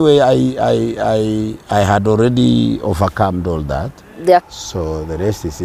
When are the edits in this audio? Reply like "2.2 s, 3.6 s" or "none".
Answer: 4.5 s